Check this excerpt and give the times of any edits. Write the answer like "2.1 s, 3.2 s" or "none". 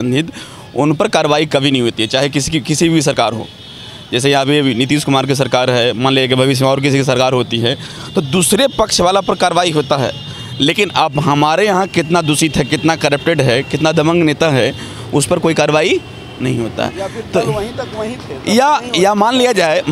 none